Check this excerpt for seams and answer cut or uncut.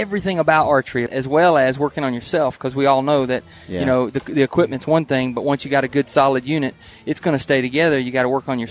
cut